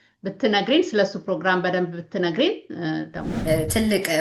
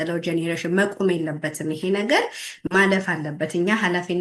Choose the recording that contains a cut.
first; 1 cut; at 3.3 s

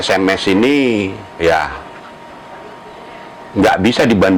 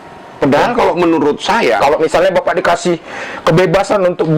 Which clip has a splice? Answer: second; 1 cut; at 1.8 s

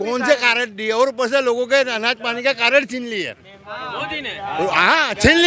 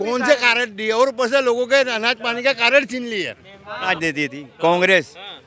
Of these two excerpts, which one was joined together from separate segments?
second; 1 cut; at 3.9 s

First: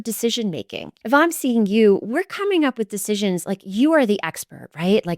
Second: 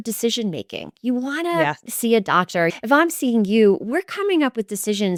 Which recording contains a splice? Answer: first; 1 cut; at 1.0 s

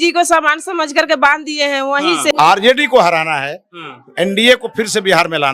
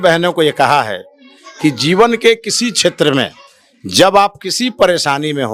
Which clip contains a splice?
first; 1 cut; at 2.3 s

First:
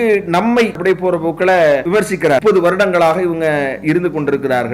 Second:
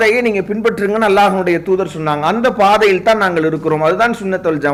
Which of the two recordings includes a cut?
first; 2 cuts; at 0.8 s, 2.2 s

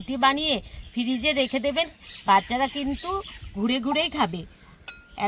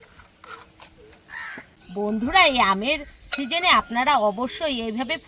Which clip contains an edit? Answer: second; 1 cut; at 1.7 s

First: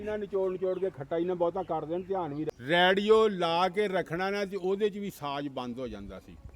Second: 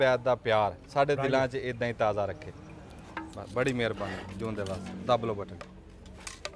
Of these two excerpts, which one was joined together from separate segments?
first; 1 cut; at 2.6 s

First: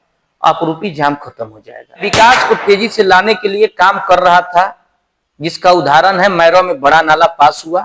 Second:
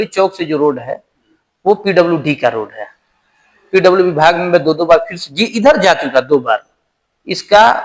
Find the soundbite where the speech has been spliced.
first; 1 cut; at 2.0 s

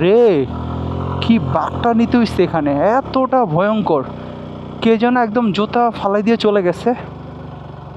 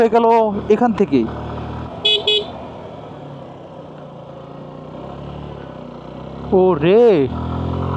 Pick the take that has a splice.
second; 1 cut; at 1.9 s

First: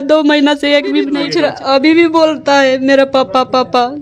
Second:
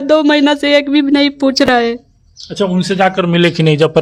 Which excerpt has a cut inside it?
first; 1 cut; at 1.2 s

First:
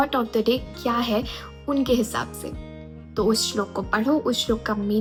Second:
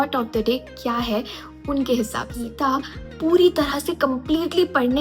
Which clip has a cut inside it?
second; 1 cut; at 2.4 s

